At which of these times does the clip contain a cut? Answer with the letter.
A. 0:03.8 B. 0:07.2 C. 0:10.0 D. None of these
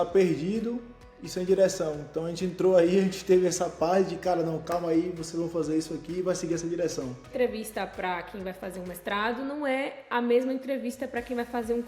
B